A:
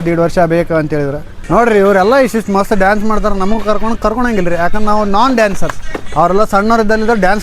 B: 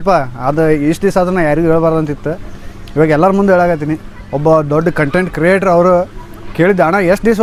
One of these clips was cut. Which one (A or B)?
A